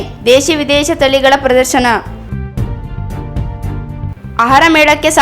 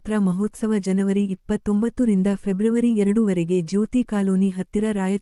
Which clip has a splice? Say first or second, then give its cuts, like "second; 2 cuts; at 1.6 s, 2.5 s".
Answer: first; 2 cuts; at 2.2 s, 4.1 s